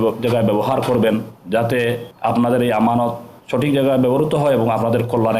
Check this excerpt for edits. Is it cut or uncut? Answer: cut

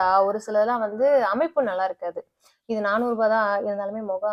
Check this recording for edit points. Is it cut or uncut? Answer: uncut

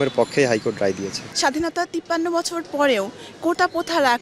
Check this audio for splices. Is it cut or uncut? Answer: cut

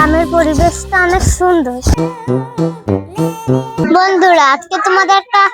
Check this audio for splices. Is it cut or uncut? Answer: cut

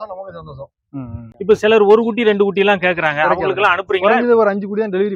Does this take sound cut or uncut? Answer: cut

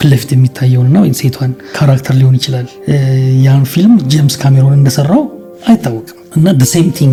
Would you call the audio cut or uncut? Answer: uncut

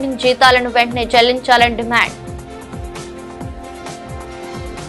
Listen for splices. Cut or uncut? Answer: uncut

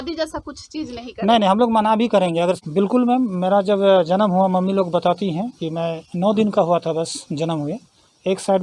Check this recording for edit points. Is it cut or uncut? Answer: cut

